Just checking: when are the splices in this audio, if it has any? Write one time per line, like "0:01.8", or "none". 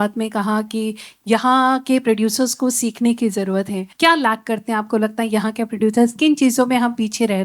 0:03.8